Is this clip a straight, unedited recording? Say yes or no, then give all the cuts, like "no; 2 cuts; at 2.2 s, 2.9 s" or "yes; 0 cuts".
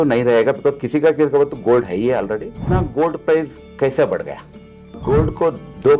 no; 2 cuts; at 2.6 s, 5.0 s